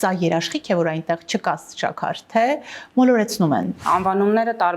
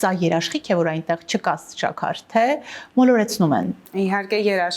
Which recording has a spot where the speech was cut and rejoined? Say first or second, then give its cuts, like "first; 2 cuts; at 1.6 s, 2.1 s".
first; 1 cut; at 3.8 s